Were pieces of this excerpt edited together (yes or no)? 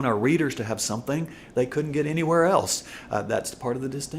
no